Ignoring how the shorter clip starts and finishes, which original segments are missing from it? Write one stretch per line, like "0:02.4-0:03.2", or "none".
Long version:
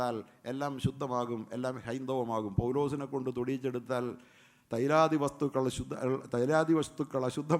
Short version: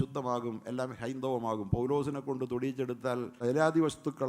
0:04.2-0:06.3